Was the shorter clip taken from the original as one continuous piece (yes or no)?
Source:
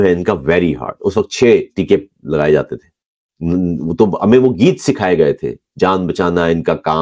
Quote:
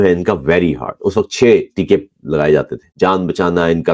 no